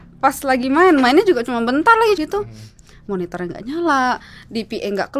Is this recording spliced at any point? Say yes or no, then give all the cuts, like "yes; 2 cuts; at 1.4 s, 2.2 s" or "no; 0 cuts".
yes; 1 cut; at 2.2 s